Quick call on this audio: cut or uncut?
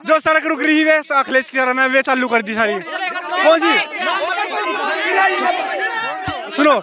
uncut